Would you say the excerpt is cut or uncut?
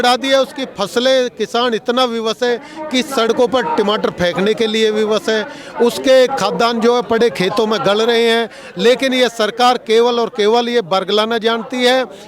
uncut